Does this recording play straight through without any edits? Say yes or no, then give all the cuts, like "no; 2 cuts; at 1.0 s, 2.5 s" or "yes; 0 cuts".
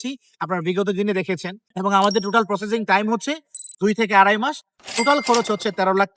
no; 1 cut; at 1.6 s